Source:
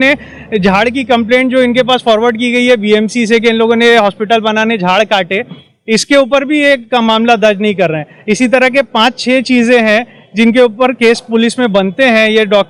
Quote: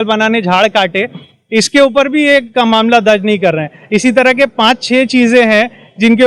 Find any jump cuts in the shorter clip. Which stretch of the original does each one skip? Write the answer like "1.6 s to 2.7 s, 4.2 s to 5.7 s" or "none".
none

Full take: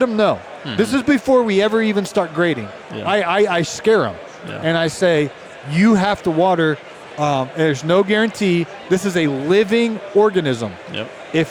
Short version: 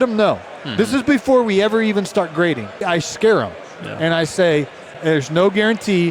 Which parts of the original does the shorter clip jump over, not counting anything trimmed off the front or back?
2.9 s to 3.5 s, 5.6 s to 7.5 s

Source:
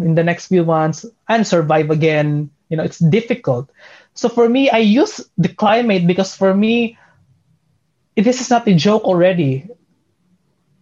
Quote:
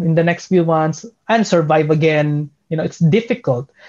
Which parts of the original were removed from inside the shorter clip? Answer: none

